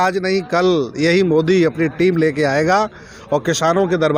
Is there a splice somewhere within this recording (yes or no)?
no